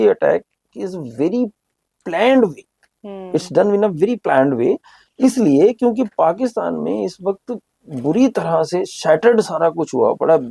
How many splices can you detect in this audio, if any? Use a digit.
0